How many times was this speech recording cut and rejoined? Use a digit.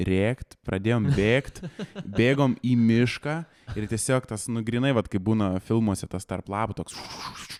0